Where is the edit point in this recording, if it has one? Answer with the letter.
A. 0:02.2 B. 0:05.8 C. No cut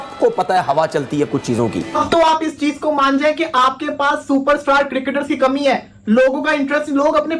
C